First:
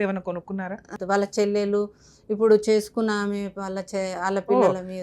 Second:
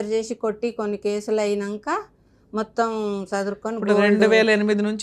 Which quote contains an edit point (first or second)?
first